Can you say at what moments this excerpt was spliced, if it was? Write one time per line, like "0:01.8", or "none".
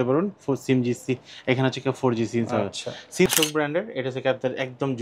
0:03.3